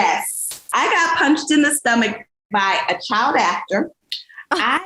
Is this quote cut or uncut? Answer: uncut